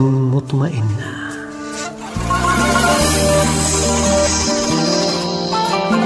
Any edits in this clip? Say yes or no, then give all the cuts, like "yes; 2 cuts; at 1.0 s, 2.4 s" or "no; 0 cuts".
yes; 1 cut; at 1.0 s